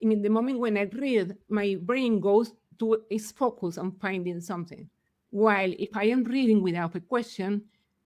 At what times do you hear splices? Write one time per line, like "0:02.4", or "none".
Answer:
0:01.4
0:02.6